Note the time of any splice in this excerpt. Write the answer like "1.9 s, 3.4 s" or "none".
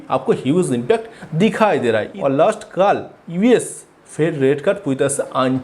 2.1 s